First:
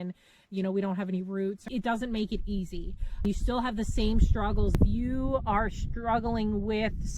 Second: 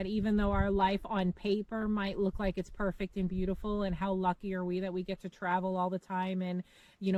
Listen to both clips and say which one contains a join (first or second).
first